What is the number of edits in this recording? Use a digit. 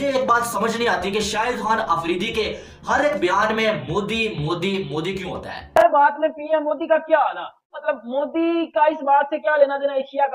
1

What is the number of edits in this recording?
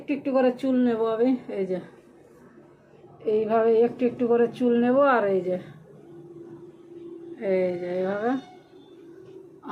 0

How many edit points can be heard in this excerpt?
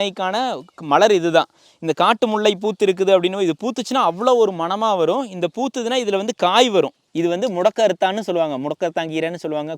1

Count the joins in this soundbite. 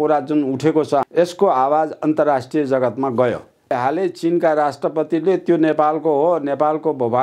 2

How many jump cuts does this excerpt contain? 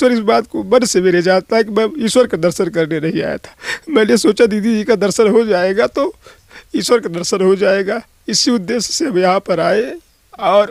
0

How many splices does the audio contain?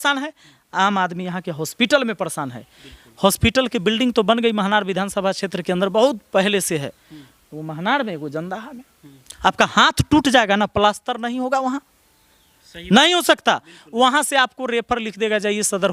0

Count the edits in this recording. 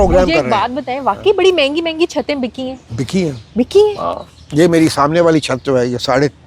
0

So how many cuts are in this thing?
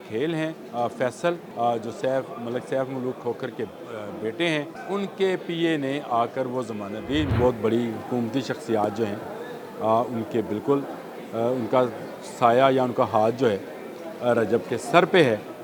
3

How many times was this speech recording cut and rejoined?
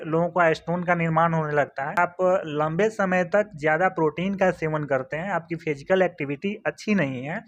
1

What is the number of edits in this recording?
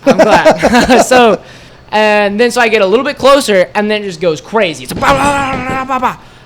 1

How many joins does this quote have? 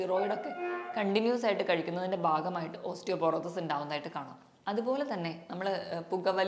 0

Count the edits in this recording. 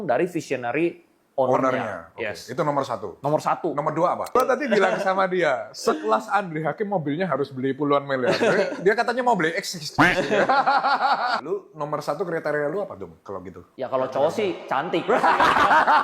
2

